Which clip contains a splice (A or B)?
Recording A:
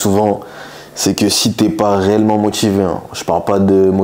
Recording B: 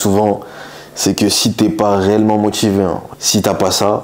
B